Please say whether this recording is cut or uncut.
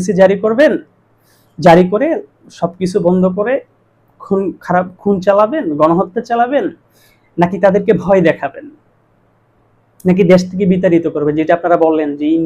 uncut